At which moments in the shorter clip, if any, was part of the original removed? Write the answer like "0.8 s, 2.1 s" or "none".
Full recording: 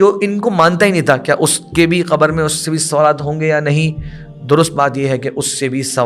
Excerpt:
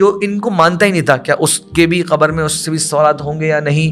none